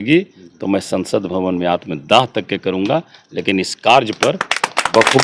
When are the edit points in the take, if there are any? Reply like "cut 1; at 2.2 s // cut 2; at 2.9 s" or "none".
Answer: none